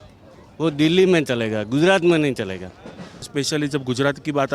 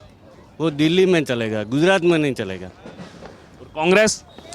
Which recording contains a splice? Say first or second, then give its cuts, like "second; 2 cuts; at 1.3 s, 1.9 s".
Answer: first; 1 cut; at 3.3 s